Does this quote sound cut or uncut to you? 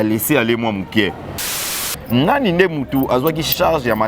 cut